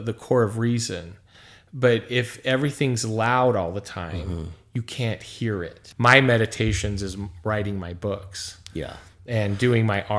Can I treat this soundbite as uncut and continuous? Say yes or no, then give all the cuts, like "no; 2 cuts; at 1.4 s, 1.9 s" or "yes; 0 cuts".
no; 1 cut; at 5.8 s